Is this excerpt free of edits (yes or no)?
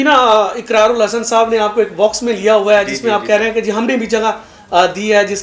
yes